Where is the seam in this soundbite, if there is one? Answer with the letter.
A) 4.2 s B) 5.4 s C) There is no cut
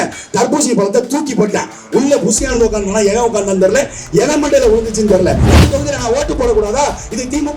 B